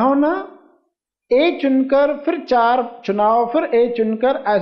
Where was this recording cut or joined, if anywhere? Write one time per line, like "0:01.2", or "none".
none